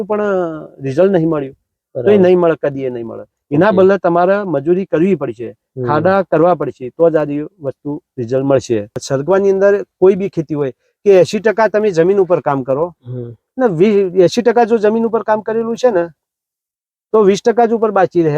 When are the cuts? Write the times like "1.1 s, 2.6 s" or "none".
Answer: 9.0 s